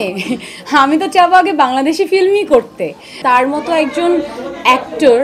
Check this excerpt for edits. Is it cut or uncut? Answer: cut